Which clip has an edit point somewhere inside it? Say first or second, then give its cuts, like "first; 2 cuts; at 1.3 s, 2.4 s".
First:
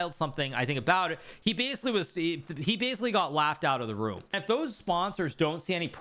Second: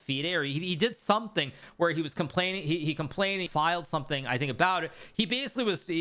first; 1 cut; at 4.3 s